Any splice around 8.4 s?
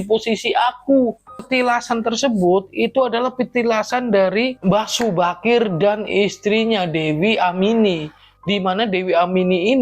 no; 1 cut; at 1.4 s

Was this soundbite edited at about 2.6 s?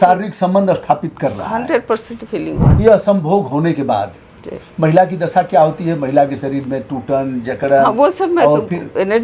yes; 1 cut; at 2.6 s

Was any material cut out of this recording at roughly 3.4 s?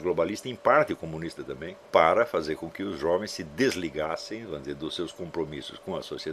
no; 1 cut; at 1.8 s

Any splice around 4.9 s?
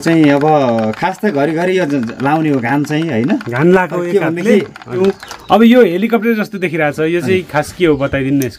yes; 1 cut; at 4.9 s

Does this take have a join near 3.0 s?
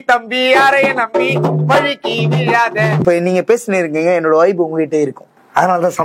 yes; 1 cut; at 3.0 s

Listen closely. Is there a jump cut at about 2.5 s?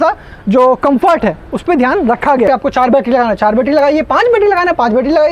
yes; 1 cut; at 2.5 s

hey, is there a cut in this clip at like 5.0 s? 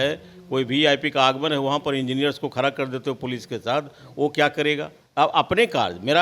yes; 1 cut; at 5.0 s

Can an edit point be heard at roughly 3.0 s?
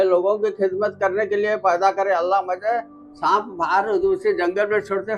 yes; 1 cut; at 3.0 s

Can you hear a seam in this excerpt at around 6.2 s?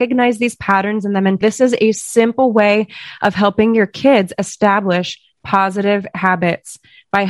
no; 1 cut; at 1.4 s

